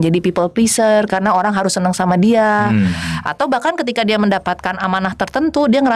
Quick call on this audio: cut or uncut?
uncut